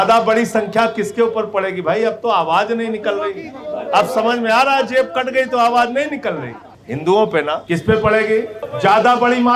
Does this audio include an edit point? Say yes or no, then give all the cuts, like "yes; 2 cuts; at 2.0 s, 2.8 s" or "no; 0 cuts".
yes; 2 cuts; at 7.6 s, 8.6 s